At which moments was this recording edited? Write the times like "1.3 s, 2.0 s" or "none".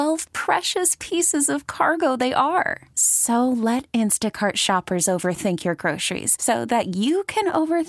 none